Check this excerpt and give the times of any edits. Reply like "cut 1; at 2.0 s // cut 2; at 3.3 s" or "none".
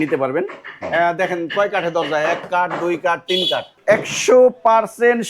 cut 1; at 3.7 s